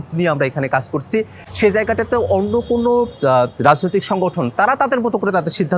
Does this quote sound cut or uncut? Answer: uncut